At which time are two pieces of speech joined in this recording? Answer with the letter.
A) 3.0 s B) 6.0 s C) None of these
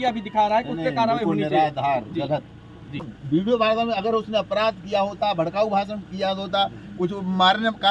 A